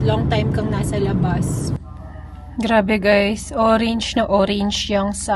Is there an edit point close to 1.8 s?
yes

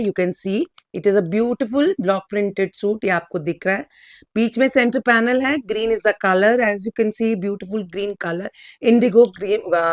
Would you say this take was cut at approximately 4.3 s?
no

